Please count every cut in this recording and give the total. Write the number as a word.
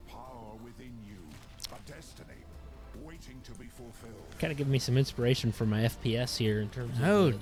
zero